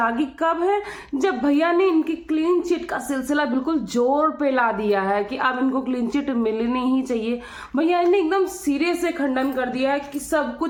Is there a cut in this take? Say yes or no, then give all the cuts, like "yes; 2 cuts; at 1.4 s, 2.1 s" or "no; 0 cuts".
no; 0 cuts